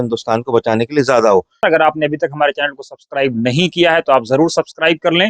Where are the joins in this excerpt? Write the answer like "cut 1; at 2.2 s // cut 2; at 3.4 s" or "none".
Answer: cut 1; at 1.6 s